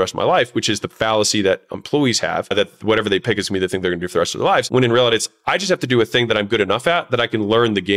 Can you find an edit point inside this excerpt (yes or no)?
yes